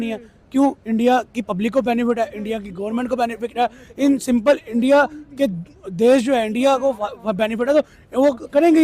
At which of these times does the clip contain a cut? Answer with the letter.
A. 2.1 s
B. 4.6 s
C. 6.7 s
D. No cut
D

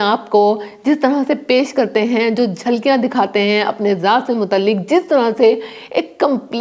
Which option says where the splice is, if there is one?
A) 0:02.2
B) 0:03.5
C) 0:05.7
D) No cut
D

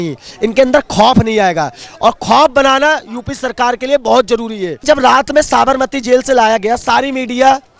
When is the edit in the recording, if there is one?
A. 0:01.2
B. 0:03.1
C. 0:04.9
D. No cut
C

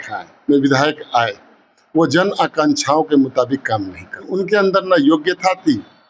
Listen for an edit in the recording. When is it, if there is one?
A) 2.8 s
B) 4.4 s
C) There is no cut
B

